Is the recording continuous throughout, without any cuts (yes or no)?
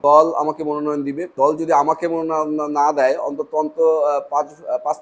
no